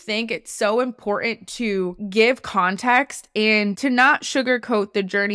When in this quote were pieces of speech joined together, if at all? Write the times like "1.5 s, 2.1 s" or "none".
3.8 s